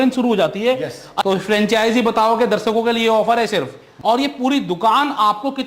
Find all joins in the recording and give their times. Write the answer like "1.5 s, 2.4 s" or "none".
1.1 s, 3.8 s

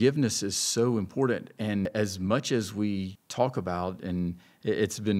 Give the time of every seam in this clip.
1.9 s, 3.2 s

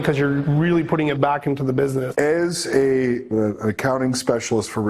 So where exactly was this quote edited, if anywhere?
2.1 s, 3.3 s

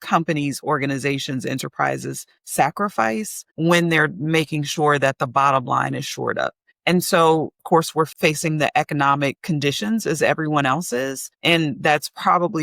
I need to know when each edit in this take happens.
7.8 s, 9.4 s

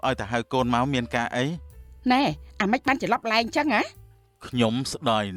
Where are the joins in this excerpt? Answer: none

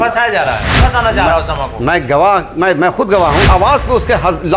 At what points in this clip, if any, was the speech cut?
0.8 s, 3.4 s

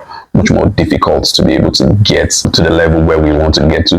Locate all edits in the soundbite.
2.4 s

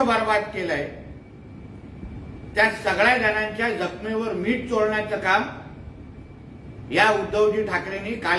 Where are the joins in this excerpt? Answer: none

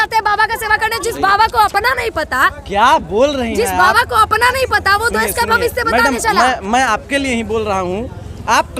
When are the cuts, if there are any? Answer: none

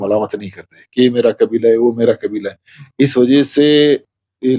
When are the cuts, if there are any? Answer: none

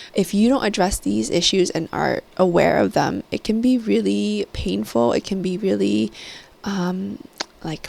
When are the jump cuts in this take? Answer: none

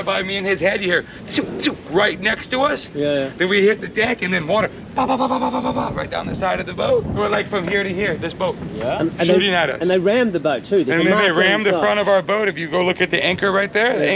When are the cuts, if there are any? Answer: 7.2 s

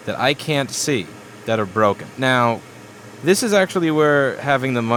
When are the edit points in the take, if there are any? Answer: none

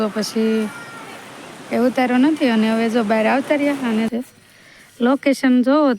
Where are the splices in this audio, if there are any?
4.1 s

